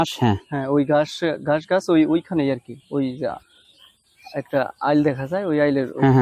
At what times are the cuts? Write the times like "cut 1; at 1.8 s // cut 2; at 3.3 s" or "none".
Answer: none